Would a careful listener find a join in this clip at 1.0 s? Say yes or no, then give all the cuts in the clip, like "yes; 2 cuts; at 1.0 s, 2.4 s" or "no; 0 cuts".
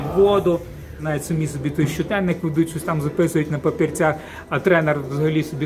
yes; 1 cut; at 1.0 s